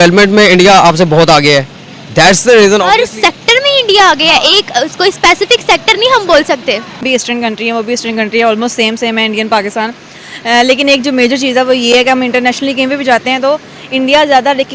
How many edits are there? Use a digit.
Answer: 1